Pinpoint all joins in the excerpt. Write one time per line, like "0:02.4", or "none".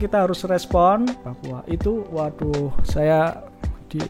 0:01.2